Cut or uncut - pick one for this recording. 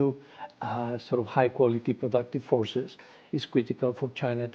uncut